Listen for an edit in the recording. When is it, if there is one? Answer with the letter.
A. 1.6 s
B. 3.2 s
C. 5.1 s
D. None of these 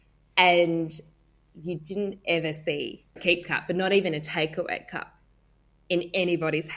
B